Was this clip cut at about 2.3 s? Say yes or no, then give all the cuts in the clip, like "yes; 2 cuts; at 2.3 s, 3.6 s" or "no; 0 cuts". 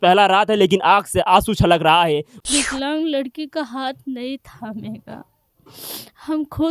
yes; 1 cut; at 2.3 s